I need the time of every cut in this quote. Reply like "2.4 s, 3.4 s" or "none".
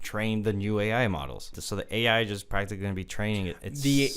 1.6 s